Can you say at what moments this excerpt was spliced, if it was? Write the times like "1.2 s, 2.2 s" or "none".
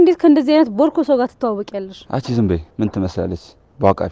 2.0 s, 3.1 s